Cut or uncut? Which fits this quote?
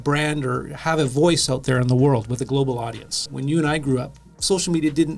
cut